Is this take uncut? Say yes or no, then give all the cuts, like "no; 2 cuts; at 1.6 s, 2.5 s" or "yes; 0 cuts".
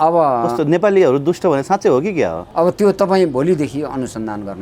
no; 1 cut; at 2.4 s